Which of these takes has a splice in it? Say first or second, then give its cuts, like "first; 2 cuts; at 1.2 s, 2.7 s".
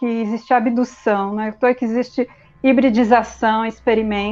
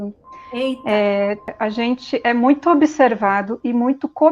second; 1 cut; at 1.5 s